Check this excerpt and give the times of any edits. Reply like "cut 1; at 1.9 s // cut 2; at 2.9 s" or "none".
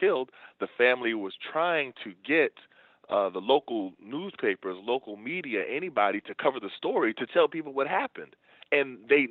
none